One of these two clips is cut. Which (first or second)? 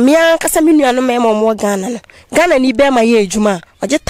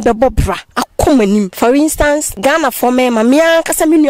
second